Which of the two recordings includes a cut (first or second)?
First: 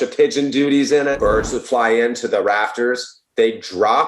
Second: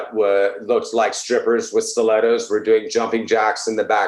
first